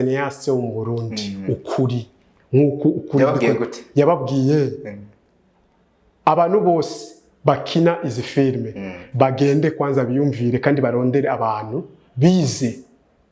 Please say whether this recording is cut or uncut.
uncut